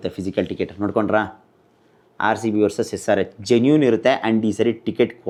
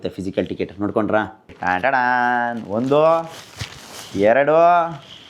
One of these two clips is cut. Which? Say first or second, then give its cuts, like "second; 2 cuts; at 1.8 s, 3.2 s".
second; 1 cut; at 1.5 s